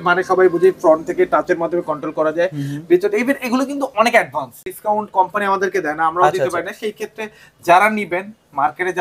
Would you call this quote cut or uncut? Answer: cut